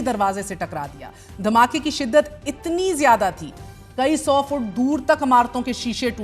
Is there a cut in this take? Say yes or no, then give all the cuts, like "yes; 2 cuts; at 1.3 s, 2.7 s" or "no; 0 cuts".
no; 0 cuts